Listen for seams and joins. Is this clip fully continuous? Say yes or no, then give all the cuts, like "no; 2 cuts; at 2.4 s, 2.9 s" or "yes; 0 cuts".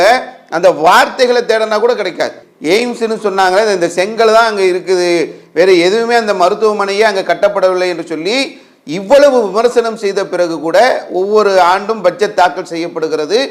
no; 1 cut; at 2.5 s